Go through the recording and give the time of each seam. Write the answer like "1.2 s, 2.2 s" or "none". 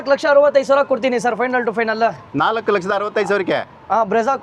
none